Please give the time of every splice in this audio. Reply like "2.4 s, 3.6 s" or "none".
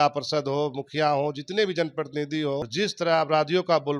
2.7 s